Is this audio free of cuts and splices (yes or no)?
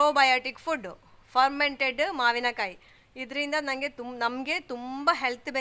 yes